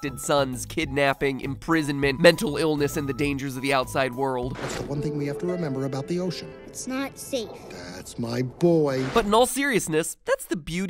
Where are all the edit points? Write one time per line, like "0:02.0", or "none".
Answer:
none